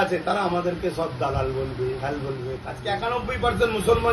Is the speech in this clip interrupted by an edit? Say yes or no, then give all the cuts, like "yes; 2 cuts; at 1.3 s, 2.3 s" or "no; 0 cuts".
yes; 1 cut; at 2.7 s